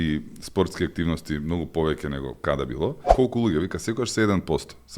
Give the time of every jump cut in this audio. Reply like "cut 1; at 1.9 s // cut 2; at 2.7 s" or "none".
cut 1; at 3.0 s